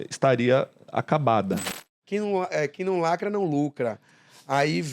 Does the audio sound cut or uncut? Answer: cut